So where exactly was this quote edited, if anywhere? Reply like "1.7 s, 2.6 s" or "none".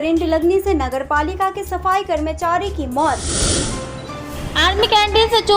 3.5 s